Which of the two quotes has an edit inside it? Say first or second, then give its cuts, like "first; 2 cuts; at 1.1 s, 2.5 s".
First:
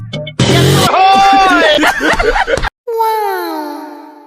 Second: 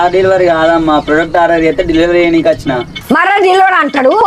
first; 1 cut; at 2.6 s